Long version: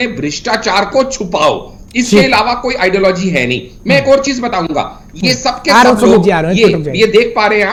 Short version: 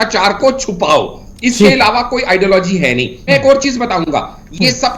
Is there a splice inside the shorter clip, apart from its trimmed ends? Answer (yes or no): yes